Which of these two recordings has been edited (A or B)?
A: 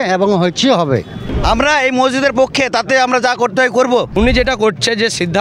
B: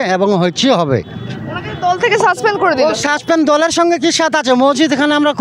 A